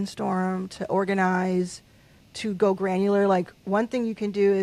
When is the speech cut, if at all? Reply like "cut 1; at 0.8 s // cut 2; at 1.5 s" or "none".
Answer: none